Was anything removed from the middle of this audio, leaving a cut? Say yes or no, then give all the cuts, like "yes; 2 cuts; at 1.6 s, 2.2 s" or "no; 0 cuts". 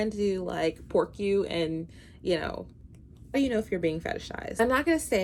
no; 0 cuts